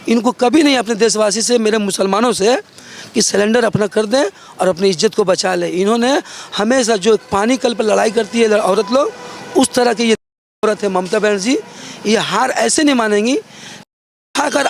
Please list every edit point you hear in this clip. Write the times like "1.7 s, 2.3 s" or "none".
none